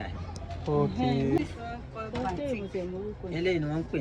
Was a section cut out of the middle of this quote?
yes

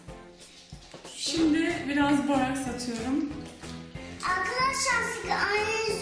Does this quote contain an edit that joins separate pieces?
yes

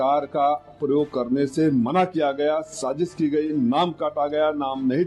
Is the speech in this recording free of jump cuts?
yes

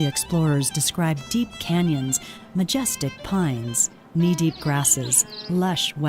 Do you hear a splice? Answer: no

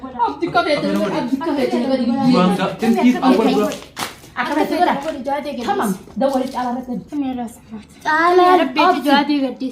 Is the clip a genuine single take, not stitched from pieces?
no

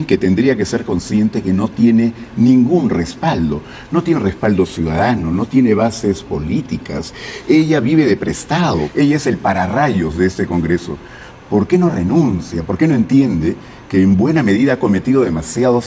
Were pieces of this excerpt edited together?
yes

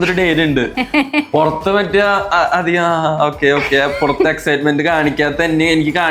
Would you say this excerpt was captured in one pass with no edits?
yes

